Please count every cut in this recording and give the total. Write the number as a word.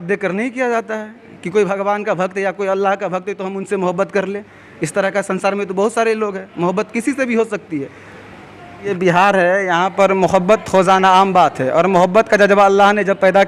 one